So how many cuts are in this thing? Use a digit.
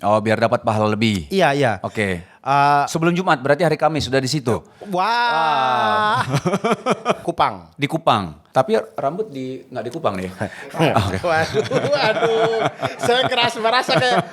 2